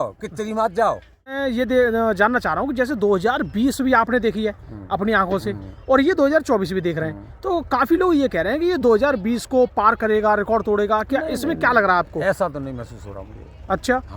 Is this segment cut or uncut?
cut